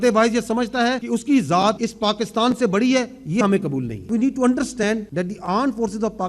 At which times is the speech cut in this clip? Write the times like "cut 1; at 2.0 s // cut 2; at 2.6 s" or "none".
cut 1; at 1.0 s // cut 2; at 1.9 s // cut 3; at 4.1 s // cut 4; at 5.1 s